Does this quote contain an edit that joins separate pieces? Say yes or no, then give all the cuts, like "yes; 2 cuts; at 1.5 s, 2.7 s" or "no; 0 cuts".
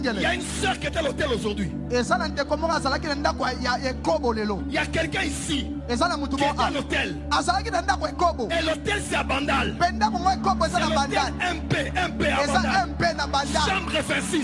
no; 0 cuts